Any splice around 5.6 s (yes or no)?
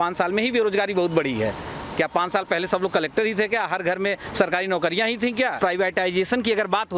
yes